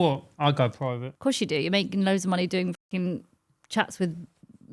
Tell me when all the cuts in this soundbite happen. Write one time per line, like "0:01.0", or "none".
0:01.1